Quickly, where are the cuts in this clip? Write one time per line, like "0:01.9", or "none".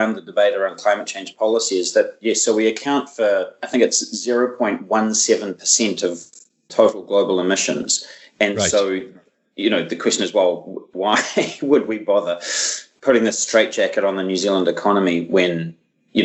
none